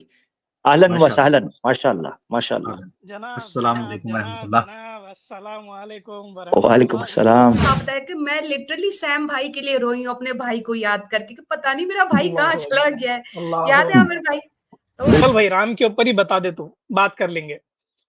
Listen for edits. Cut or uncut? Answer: cut